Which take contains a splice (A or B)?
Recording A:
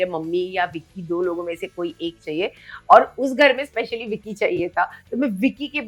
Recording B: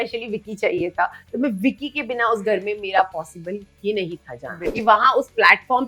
B